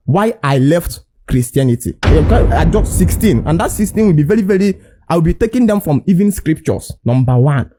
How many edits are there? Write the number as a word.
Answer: zero